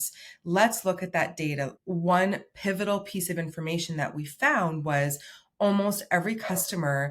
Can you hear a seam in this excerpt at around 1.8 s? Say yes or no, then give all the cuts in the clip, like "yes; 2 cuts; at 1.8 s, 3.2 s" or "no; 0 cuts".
yes; 1 cut; at 1.8 s